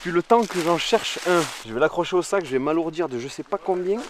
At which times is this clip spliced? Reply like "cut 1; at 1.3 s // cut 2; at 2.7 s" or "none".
cut 1; at 1.6 s